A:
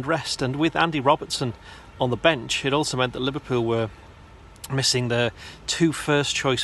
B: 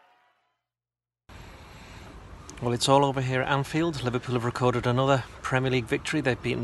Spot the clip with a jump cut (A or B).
B